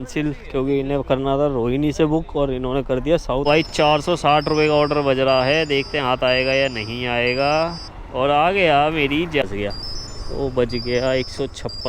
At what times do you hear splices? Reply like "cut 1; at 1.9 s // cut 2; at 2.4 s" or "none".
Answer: cut 1; at 3.4 s // cut 2; at 9.4 s